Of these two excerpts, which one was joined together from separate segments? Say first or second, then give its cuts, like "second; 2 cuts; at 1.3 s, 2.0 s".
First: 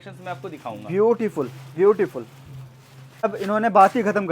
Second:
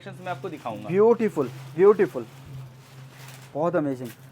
first; 1 cut; at 3.2 s